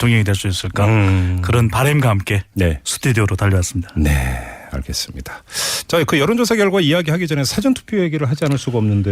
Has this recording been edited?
yes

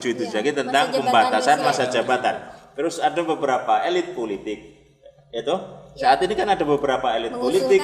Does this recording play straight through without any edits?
yes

